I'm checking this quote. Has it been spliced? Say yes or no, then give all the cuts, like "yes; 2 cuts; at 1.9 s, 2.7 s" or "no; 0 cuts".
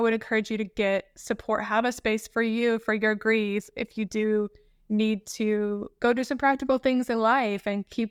no; 0 cuts